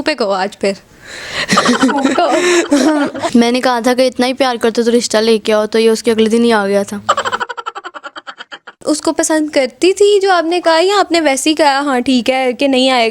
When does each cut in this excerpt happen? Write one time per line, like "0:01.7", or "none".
0:03.2
0:08.8